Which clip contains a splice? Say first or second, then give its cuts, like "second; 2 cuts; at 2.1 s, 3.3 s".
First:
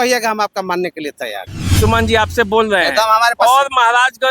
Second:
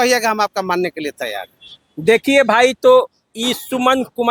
first; 1 cut; at 1.6 s